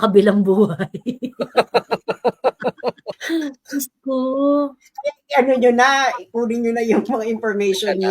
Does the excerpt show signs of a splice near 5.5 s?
no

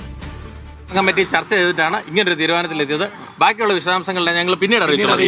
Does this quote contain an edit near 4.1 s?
no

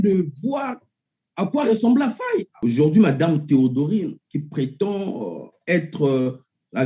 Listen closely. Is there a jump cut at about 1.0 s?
no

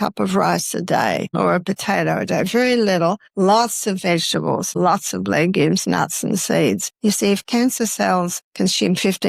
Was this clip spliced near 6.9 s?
yes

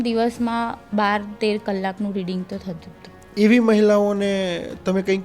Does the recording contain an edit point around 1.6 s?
no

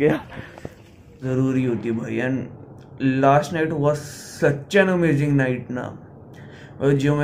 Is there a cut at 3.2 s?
no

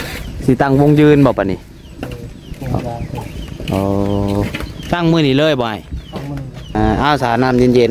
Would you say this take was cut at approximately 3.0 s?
no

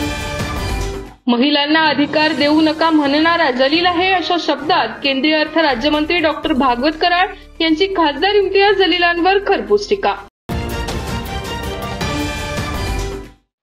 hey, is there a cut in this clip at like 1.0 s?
yes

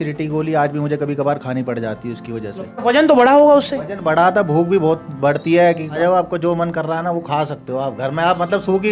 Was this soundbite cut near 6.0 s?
yes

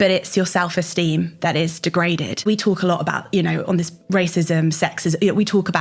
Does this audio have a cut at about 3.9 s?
no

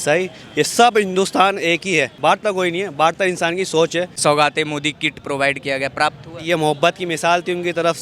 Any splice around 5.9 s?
no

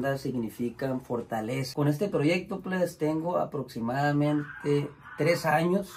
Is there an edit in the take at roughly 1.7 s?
yes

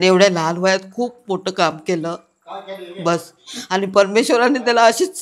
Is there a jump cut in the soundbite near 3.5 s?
no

